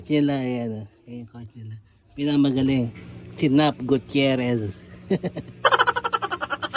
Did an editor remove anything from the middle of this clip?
yes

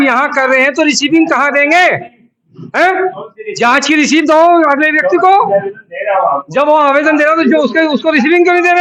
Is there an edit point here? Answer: no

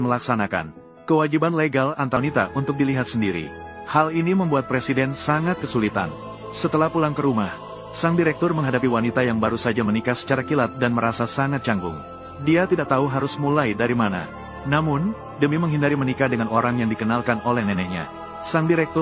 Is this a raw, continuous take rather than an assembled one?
no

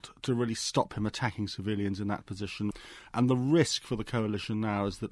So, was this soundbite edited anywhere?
yes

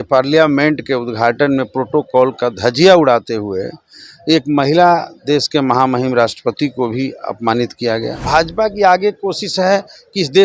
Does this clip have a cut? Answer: yes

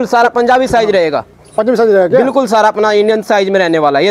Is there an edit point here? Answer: no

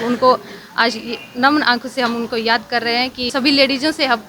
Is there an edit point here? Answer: yes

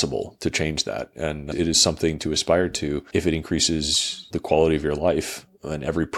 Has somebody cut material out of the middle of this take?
yes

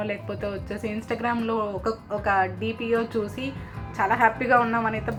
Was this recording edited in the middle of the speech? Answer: no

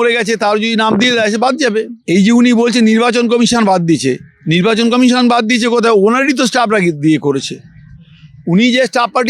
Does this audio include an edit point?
yes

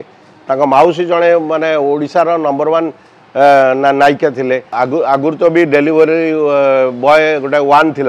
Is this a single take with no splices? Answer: no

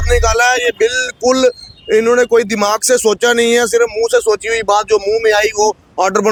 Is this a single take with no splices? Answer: yes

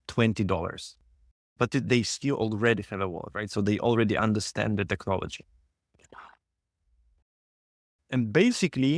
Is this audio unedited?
yes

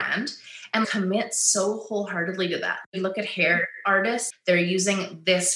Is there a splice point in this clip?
yes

